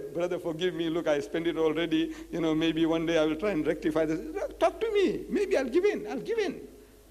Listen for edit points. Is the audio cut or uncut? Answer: cut